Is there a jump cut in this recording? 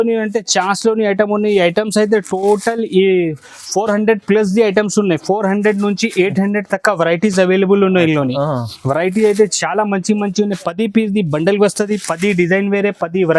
no; 0 cuts

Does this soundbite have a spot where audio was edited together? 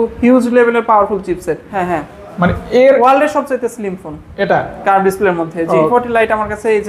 yes; 2 cuts; at 1.7 s, 5.9 s

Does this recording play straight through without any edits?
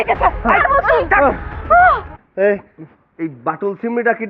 no; 1 cut; at 2.2 s

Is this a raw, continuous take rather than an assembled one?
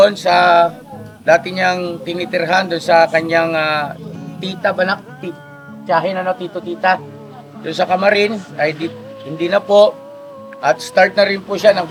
yes; 0 cuts

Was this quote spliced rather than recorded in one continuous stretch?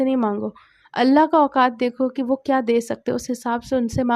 no; 0 cuts

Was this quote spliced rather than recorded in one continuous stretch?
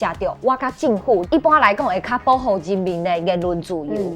yes; 1 cut; at 1.2 s

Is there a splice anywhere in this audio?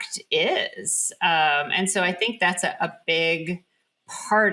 no; 0 cuts

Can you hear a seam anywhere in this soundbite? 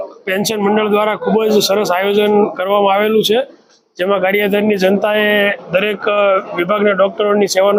no; 0 cuts

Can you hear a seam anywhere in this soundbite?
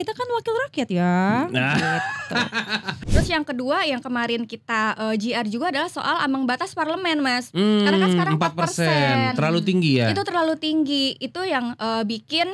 yes; 1 cut; at 3.0 s

